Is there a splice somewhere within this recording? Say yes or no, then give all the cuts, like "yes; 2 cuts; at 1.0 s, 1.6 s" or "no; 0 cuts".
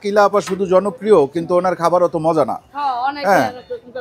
no; 0 cuts